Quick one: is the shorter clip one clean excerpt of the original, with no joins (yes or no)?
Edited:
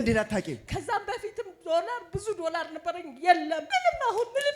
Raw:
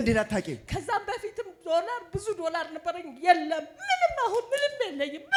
no